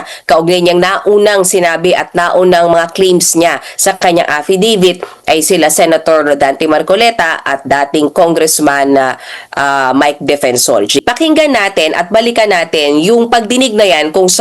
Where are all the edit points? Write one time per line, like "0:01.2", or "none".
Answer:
0:11.0